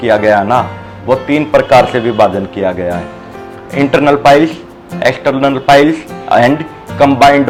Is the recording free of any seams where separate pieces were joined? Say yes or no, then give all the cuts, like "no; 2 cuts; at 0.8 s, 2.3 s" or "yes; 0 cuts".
yes; 0 cuts